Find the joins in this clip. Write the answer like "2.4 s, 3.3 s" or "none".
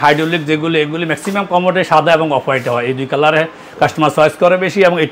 none